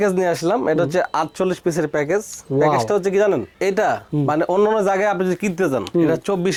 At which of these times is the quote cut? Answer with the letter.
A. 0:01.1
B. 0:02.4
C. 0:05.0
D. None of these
D